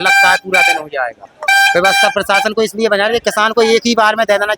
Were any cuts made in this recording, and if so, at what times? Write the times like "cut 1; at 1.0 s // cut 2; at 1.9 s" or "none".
cut 1; at 1.3 s